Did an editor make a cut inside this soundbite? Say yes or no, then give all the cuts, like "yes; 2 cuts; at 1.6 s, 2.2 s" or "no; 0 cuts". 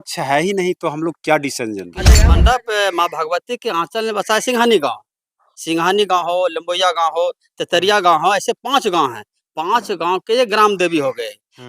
yes; 1 cut; at 2.2 s